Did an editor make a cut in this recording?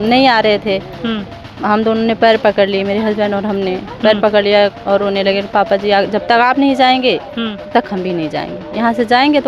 no; 0 cuts

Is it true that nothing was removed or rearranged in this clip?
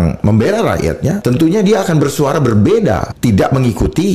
no; 2 cuts; at 1.2 s, 3.1 s

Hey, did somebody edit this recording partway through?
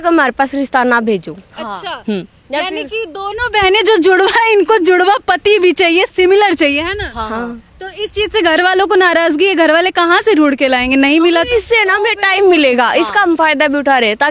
no; 0 cuts

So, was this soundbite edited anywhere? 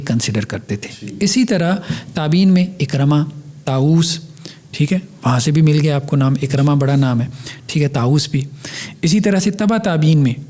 no; 0 cuts

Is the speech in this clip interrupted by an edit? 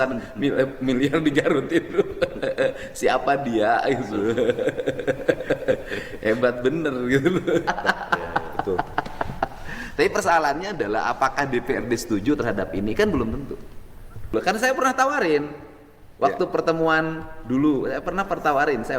yes; 2 cuts; at 7.7 s, 14.3 s

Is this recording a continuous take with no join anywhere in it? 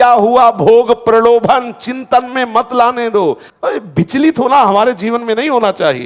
no; 1 cut; at 3.5 s

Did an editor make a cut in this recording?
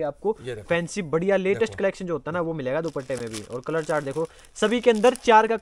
no; 0 cuts

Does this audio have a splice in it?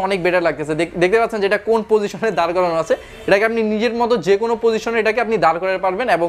no; 0 cuts

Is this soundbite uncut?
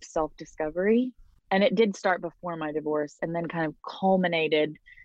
no; 1 cut; at 1.3 s

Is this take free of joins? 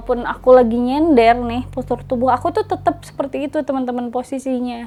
yes; 0 cuts

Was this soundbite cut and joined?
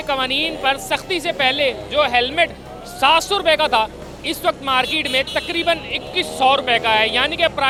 no; 0 cuts

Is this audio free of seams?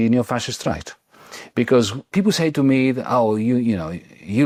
yes; 0 cuts

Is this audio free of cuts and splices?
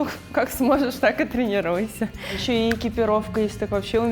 no; 1 cut; at 2.4 s

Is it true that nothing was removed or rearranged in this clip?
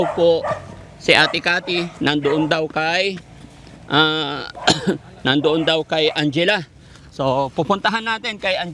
yes; 0 cuts

